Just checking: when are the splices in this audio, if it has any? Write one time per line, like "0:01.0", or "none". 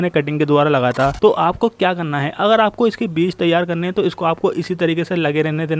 0:01.1